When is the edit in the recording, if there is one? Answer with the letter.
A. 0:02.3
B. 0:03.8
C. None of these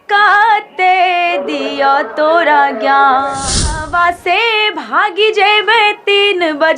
B